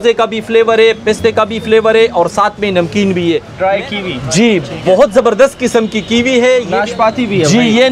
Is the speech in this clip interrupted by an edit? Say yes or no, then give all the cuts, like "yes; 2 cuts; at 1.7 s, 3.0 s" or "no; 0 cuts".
yes; 2 cuts; at 3.5 s, 6.7 s